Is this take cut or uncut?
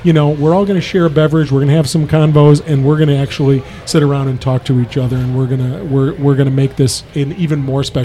uncut